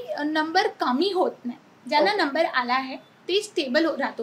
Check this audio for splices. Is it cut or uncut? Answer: uncut